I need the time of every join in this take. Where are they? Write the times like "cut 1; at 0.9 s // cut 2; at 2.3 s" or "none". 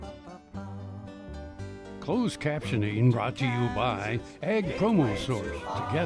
cut 1; at 2.0 s